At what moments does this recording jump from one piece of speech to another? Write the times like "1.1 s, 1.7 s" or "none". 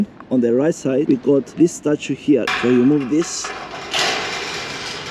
2.5 s